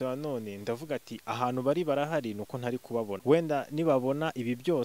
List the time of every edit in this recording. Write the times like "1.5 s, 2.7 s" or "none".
3.2 s